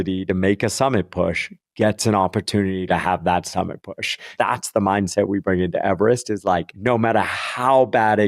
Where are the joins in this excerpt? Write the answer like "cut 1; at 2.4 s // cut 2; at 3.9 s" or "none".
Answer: cut 1; at 4.3 s // cut 2; at 6.7 s